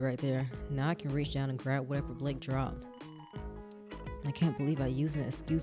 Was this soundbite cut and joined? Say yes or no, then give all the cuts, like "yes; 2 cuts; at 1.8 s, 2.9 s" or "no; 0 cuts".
no; 0 cuts